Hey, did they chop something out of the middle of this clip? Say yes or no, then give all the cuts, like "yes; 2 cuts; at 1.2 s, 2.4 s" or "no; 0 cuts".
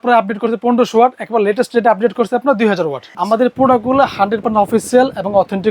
yes; 1 cut; at 3.1 s